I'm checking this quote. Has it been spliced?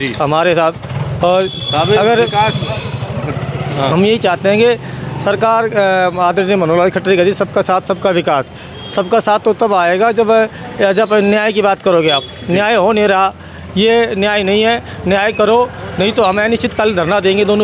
no; 0 cuts

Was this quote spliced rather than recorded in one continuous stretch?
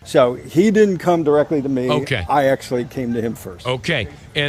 no; 0 cuts

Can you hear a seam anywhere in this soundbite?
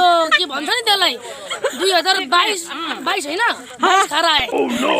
no; 0 cuts

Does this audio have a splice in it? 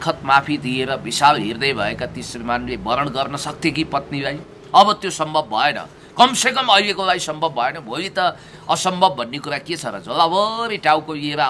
no; 0 cuts

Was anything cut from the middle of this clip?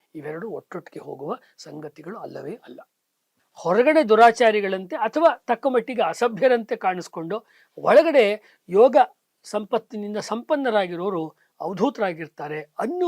yes; 1 cut; at 3.3 s

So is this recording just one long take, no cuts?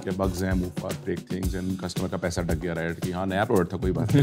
yes; 0 cuts

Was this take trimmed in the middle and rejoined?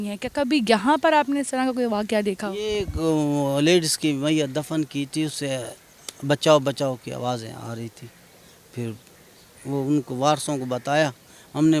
no; 0 cuts

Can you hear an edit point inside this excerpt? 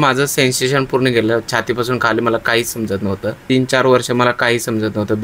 yes; 1 cut; at 3.4 s

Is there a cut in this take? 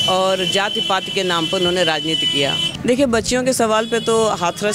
yes; 1 cut; at 2.7 s

